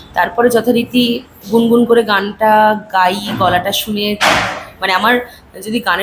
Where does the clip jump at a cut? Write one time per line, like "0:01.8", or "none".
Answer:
none

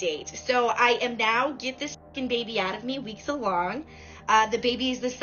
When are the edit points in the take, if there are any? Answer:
none

